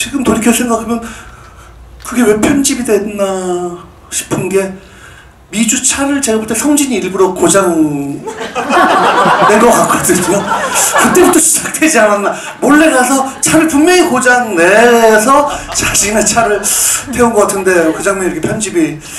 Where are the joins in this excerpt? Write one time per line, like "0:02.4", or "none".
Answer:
none